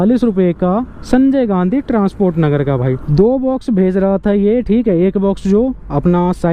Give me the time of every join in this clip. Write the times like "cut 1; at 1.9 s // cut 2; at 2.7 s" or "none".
cut 1; at 3.0 s